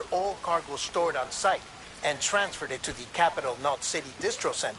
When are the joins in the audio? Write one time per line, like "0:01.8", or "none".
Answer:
0:03.8